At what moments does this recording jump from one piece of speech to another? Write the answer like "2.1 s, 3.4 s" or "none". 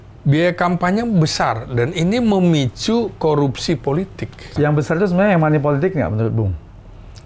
4.5 s